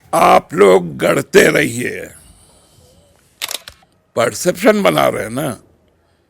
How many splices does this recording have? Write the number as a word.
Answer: one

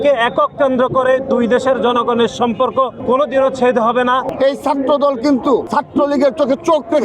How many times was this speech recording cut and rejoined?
three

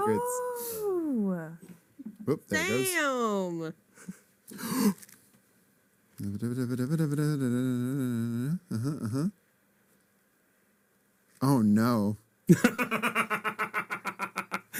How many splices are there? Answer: zero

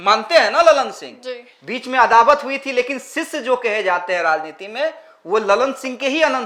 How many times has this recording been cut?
zero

